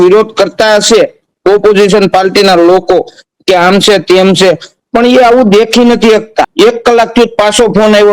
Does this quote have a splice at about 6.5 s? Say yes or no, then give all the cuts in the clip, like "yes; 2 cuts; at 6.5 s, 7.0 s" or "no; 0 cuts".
yes; 1 cut; at 6.5 s